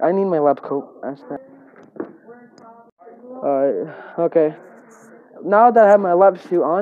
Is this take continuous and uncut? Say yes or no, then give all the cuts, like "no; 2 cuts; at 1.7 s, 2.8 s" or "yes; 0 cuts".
no; 2 cuts; at 1.3 s, 2.9 s